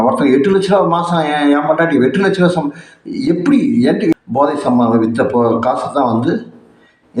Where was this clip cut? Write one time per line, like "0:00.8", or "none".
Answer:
0:04.1